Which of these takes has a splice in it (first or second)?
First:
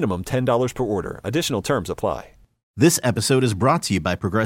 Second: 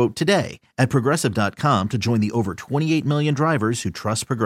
first